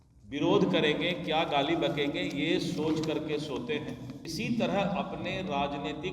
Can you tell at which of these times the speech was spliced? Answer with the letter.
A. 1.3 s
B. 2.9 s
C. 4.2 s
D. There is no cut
C